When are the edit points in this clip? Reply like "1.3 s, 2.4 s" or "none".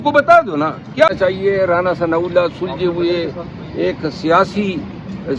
1.1 s